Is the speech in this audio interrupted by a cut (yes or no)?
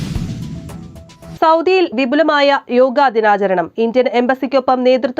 yes